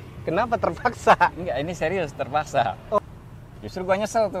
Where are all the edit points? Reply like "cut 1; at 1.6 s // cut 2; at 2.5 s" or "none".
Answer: cut 1; at 3.0 s